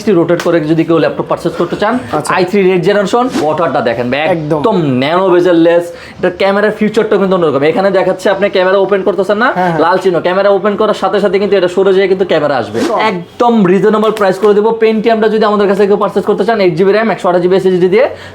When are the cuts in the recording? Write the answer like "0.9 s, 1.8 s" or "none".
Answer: 3.4 s, 12.9 s